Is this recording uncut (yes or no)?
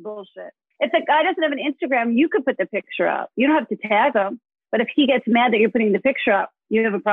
yes